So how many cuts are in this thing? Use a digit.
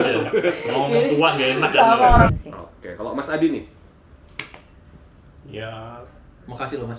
1